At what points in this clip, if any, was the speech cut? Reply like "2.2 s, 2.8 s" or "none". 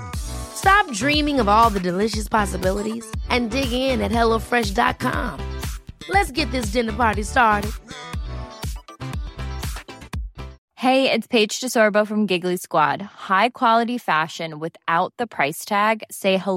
10.6 s